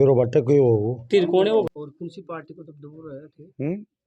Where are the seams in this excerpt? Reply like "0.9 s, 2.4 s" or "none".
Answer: 1.6 s